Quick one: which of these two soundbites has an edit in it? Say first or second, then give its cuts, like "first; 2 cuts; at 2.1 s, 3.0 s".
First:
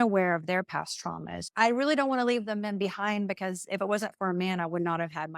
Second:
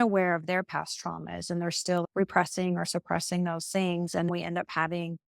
first; 1 cut; at 1.4 s